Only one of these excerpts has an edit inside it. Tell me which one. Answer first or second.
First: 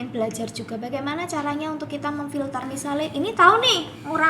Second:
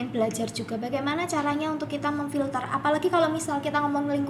first